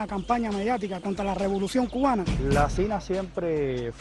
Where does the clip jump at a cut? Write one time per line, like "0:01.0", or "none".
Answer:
0:02.2